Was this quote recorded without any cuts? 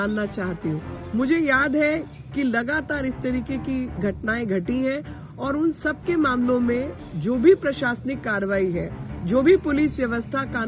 yes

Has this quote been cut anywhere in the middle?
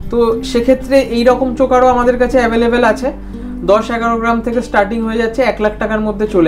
no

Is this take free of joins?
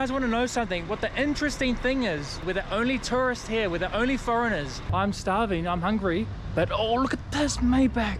no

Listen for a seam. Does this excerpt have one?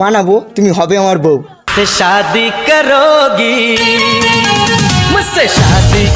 no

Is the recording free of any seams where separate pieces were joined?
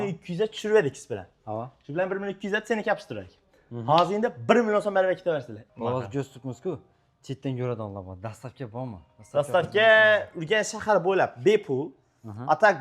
no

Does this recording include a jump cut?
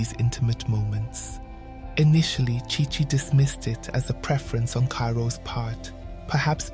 no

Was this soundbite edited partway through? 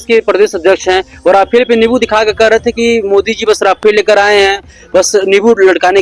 no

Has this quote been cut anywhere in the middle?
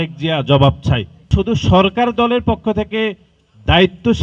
yes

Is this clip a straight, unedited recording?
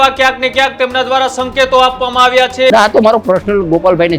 no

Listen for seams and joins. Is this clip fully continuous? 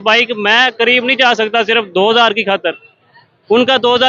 yes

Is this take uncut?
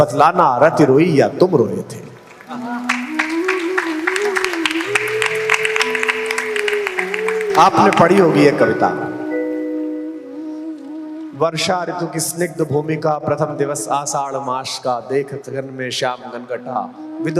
yes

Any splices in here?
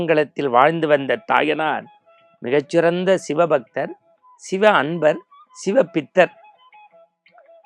no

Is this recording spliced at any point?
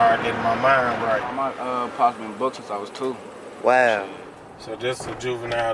yes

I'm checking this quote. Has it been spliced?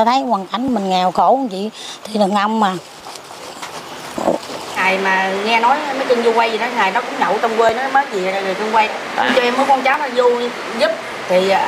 yes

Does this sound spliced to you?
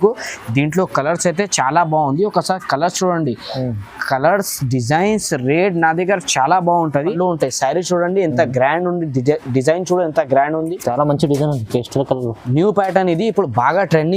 yes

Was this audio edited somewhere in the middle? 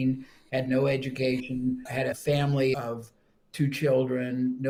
no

